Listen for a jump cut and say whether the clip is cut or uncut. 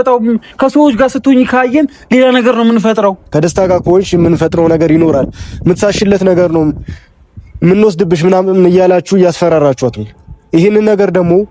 cut